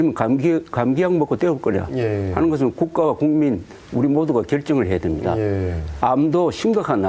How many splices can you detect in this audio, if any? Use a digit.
1